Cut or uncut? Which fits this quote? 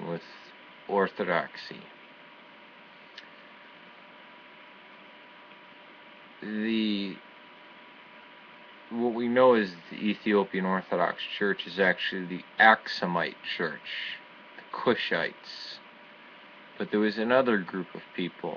cut